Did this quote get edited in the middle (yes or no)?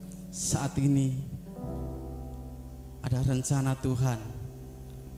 no